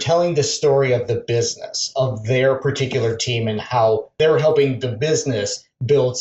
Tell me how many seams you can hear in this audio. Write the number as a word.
one